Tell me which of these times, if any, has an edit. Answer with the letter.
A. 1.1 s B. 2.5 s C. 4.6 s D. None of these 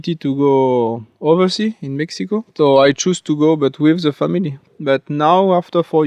C